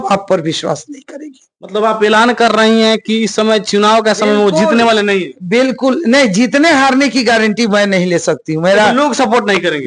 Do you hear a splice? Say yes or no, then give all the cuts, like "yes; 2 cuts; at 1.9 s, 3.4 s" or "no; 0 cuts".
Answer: no; 0 cuts